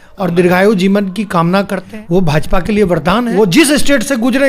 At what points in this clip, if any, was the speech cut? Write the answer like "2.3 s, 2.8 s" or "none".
1.8 s, 3.3 s